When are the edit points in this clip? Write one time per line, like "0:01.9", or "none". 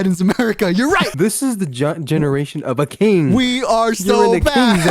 0:01.1